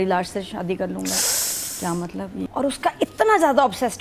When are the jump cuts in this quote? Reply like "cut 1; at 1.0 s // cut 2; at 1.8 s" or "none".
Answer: cut 1; at 2.5 s